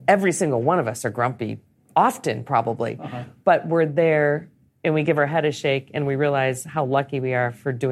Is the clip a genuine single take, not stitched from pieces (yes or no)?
yes